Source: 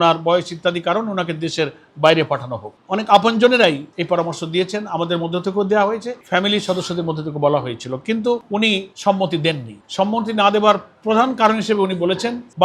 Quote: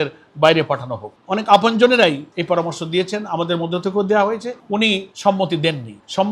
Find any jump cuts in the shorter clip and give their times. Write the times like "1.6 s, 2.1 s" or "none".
4.6 s